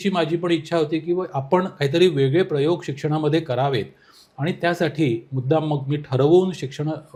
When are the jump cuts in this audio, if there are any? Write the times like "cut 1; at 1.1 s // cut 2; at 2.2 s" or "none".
none